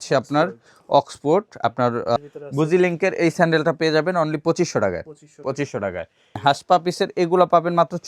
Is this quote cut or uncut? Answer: cut